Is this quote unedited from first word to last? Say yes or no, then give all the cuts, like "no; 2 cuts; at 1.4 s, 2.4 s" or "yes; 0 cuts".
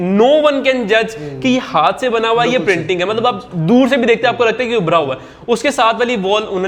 yes; 0 cuts